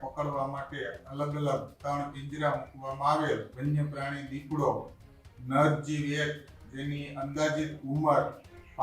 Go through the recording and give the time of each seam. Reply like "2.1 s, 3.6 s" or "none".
3.5 s